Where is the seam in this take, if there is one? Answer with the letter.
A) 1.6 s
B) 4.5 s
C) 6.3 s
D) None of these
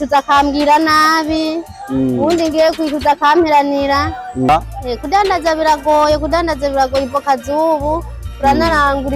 B